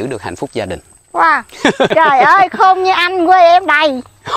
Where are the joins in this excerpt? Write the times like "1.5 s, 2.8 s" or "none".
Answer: 1.9 s

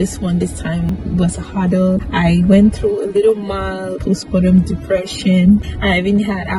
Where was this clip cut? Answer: 0.9 s

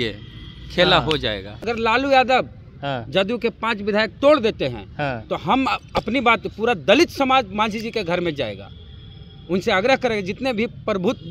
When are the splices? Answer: 1.5 s

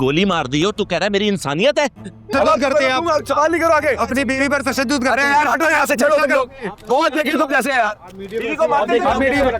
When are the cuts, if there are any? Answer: 2.3 s

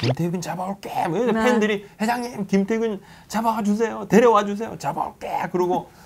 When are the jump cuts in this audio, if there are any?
none

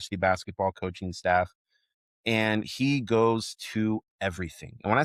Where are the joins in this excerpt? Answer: none

